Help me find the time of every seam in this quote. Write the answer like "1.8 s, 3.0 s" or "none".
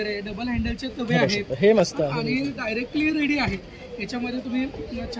none